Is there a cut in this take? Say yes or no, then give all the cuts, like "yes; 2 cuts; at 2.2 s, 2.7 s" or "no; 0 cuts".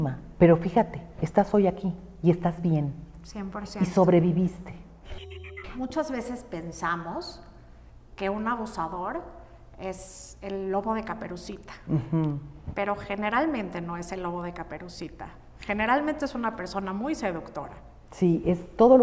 yes; 1 cut; at 5.3 s